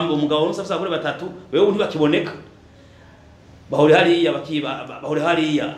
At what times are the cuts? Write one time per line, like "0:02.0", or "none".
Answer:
none